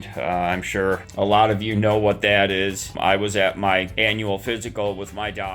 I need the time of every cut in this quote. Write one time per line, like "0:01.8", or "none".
0:01.1
0:02.9
0:03.9